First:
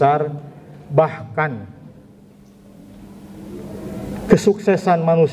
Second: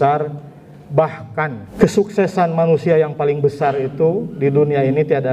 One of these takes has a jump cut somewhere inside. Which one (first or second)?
second